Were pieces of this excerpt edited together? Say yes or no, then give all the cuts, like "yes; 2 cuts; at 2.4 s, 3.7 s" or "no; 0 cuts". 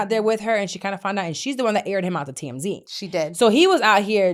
no; 0 cuts